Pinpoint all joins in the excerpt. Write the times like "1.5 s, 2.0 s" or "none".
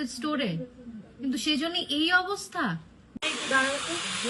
3.0 s